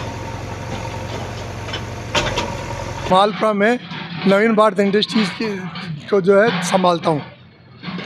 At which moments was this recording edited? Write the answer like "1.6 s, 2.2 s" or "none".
3.1 s